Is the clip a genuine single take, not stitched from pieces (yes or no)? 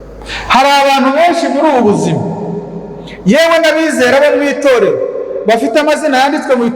yes